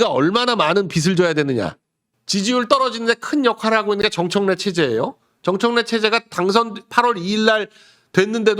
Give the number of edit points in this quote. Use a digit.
1